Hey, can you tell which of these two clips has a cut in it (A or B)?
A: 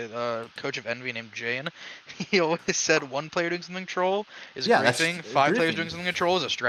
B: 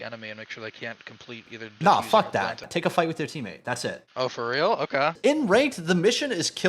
B